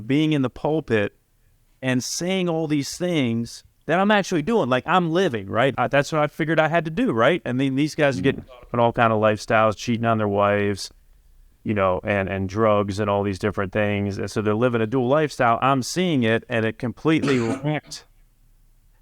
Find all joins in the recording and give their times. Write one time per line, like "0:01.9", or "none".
0:05.7